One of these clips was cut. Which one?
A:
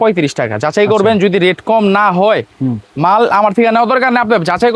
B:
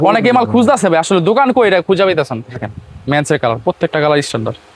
B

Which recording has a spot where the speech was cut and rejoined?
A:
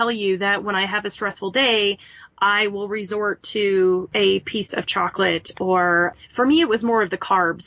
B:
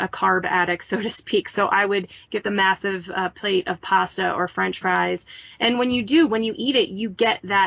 A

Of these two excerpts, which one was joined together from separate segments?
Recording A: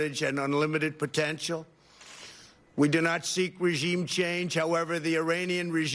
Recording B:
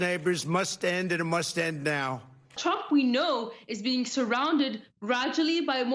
B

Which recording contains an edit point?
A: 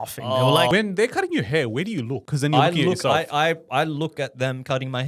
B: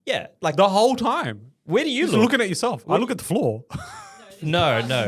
A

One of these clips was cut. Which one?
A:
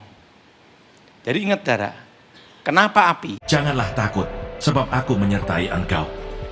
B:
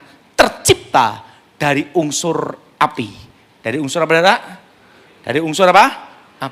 A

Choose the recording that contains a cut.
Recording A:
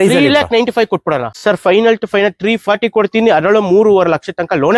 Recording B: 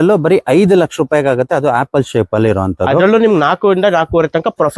A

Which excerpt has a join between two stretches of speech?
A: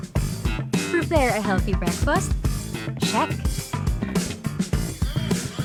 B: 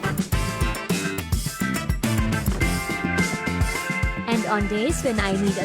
B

